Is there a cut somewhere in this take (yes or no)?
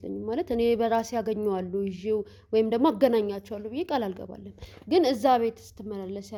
no